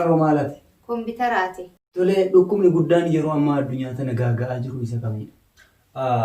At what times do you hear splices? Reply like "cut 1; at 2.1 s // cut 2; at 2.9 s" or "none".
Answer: cut 1; at 2.0 s